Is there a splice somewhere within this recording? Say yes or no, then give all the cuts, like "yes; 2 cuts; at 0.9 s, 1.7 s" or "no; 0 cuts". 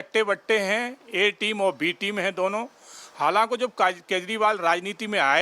no; 0 cuts